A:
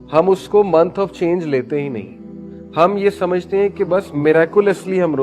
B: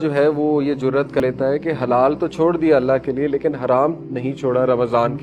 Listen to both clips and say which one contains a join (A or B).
B